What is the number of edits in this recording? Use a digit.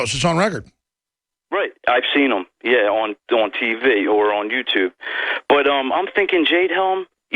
1